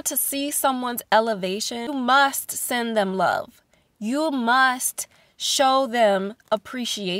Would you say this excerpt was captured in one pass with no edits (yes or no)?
no